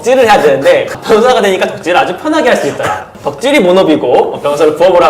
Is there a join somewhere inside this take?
yes; 2 cuts; at 1.0 s, 3.1 s

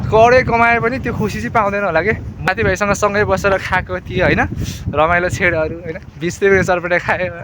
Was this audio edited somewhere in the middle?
yes; 1 cut; at 2.5 s

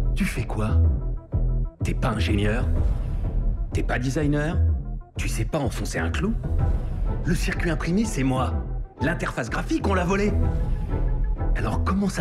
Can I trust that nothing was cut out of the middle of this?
yes; 0 cuts

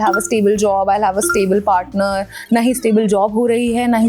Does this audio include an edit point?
no; 0 cuts

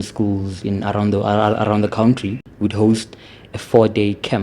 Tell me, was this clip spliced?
yes; 1 cut; at 2.5 s

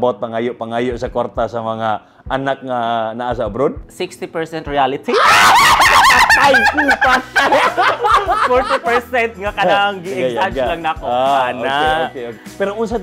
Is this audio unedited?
no; 1 cut; at 3.9 s

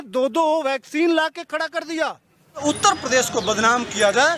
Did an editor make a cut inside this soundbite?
yes; 1 cut; at 2.6 s

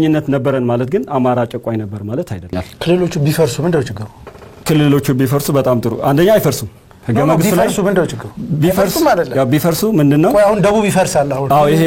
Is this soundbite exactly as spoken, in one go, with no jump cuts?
no; 1 cut; at 2.7 s

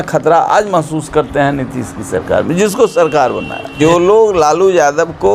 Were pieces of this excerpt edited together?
yes; 1 cut; at 3.7 s

